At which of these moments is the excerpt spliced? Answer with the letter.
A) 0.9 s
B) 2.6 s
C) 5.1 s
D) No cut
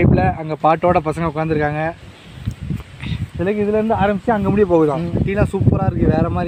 C